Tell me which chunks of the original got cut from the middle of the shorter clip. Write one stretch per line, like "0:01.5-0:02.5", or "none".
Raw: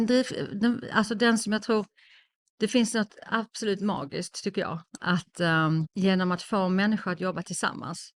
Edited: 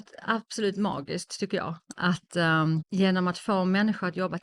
none